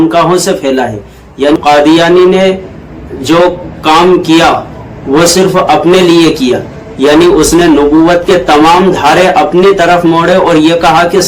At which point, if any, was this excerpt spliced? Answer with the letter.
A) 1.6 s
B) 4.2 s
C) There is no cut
A